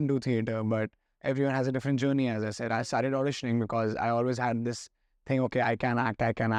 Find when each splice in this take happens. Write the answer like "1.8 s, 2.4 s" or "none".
none